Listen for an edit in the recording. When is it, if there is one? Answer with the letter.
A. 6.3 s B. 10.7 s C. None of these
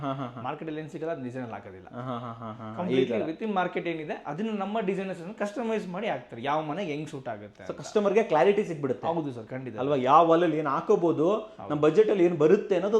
C